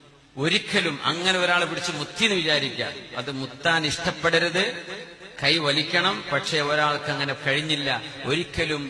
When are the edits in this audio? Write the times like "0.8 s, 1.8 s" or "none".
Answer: none